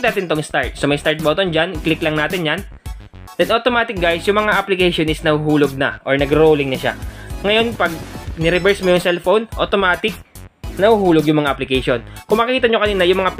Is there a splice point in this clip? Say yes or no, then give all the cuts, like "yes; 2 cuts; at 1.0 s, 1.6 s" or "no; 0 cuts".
no; 0 cuts